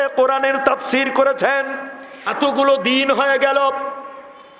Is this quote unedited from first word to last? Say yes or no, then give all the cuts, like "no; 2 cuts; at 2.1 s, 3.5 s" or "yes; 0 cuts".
no; 1 cut; at 2.3 s